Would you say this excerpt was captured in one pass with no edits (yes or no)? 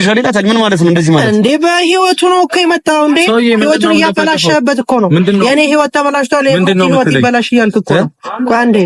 yes